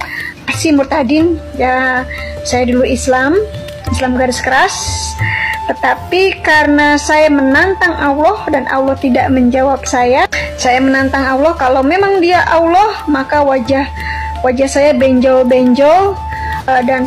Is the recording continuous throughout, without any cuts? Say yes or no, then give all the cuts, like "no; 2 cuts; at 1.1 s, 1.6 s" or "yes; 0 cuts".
yes; 0 cuts